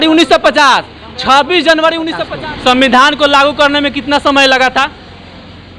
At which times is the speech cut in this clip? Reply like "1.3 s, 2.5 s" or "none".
2.2 s